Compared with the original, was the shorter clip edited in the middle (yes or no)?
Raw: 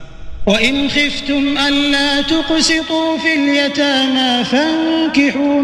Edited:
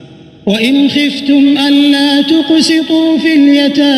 no